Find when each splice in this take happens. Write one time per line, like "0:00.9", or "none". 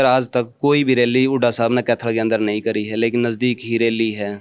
none